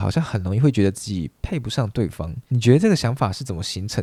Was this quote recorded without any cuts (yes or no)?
yes